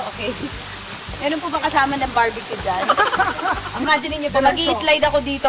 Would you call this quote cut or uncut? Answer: cut